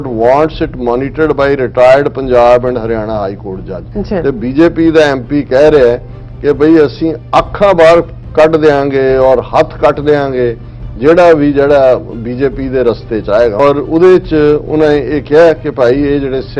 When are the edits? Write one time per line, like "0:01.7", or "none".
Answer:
0:03.9
0:13.6